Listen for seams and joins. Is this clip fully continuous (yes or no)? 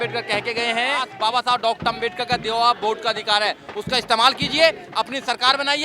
no